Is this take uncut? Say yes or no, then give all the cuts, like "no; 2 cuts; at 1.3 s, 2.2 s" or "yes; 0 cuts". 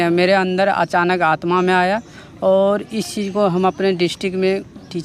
yes; 0 cuts